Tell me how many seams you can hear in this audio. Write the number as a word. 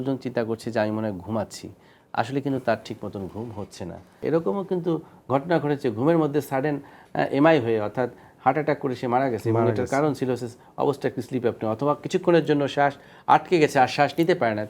zero